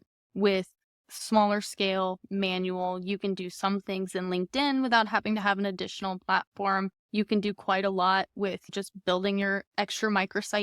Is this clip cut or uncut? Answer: cut